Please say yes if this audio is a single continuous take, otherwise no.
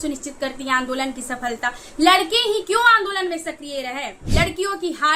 no